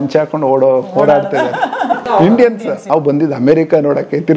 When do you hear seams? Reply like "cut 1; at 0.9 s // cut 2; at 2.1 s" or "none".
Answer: cut 1; at 2.0 s // cut 2; at 2.8 s